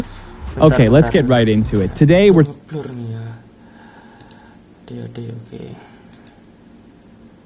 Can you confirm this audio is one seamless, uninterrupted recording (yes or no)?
yes